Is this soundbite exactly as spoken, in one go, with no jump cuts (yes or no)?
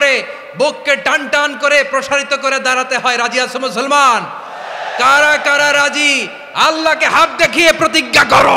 yes